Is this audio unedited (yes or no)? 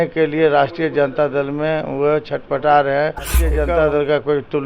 no